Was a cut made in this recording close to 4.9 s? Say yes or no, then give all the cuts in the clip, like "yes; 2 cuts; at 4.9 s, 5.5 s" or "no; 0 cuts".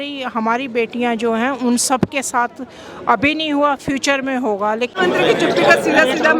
yes; 1 cut; at 4.9 s